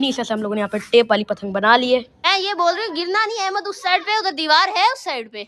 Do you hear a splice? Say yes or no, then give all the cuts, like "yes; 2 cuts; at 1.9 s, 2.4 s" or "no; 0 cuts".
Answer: yes; 1 cut; at 2.2 s